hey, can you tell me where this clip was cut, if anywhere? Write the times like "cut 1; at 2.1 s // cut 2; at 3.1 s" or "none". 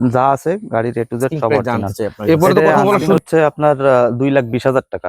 cut 1; at 3.2 s